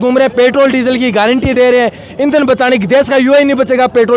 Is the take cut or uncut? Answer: uncut